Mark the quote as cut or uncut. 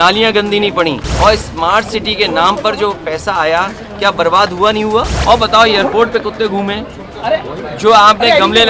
cut